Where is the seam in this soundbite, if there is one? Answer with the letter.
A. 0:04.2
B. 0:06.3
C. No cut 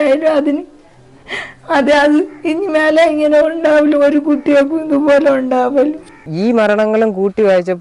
B